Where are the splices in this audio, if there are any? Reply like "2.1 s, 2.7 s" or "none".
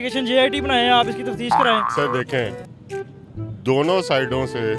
1.9 s